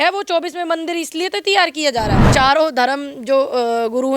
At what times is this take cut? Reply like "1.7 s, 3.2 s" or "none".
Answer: 2.2 s